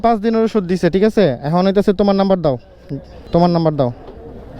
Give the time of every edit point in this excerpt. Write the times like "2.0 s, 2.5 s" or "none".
3.3 s